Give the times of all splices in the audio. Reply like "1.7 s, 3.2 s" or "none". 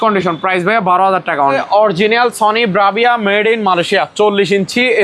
1.6 s